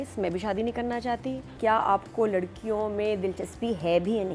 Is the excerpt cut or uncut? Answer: cut